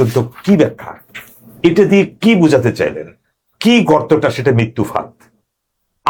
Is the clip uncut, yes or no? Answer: yes